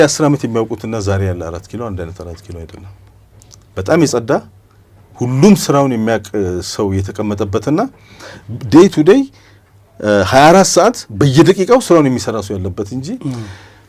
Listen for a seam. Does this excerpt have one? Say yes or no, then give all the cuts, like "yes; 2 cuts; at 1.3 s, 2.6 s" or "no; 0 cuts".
no; 0 cuts